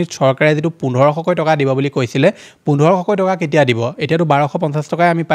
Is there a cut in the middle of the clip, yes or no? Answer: no